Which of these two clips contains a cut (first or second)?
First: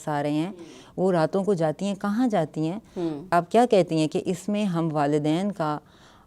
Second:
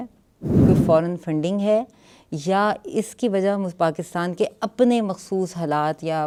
first